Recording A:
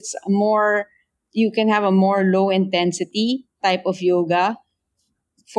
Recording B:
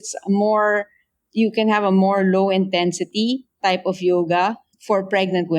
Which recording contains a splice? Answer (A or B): B